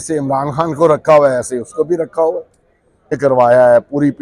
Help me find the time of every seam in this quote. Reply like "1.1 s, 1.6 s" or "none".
3.2 s